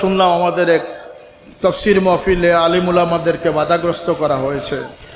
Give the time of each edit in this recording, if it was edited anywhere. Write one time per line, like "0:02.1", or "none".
none

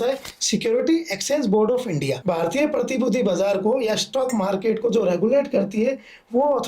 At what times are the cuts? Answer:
0:02.2

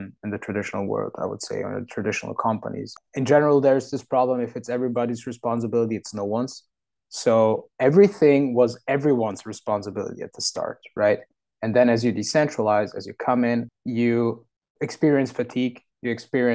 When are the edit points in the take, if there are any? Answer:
0:02.9

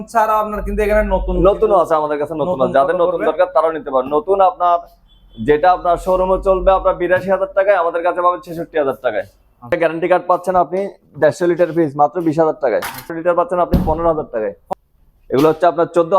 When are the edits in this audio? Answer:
0:09.7
0:13.1
0:14.6

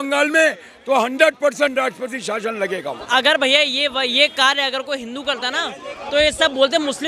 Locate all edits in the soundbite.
0:03.0

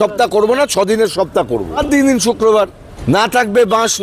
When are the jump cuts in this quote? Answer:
0:01.8
0:02.9

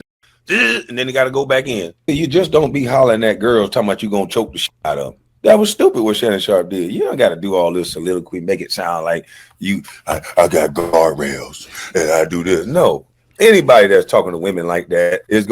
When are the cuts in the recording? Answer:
0:01.9

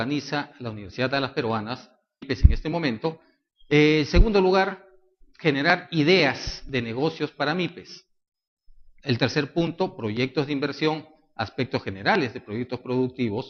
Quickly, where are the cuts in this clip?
none

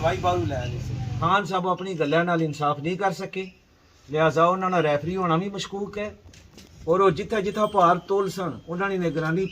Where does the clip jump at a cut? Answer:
0:01.2

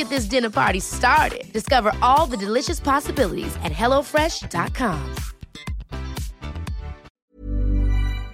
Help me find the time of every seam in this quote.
0:07.0

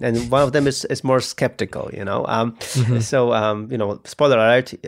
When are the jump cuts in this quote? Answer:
0:03.0

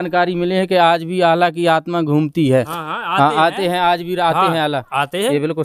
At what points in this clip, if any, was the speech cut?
none

